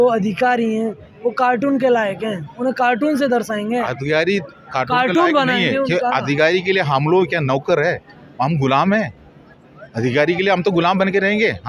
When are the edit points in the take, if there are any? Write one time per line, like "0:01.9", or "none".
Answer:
none